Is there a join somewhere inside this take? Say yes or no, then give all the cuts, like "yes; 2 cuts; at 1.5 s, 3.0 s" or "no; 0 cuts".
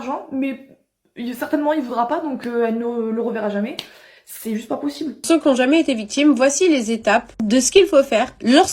yes; 1 cut; at 5.2 s